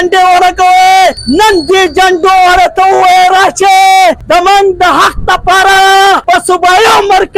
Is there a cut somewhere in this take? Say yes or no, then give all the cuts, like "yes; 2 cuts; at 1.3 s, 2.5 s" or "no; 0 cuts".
yes; 3 cuts; at 1.2 s, 4.2 s, 6.2 s